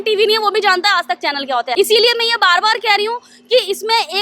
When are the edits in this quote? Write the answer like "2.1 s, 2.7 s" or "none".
1.8 s